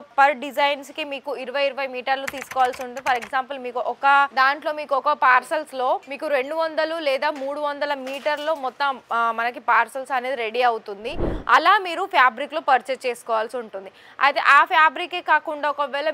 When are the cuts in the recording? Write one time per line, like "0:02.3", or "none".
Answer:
none